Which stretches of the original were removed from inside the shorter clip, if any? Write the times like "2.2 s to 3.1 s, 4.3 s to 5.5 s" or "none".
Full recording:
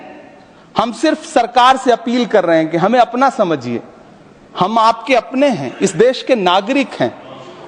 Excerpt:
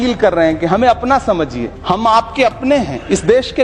3.8 s to 4.4 s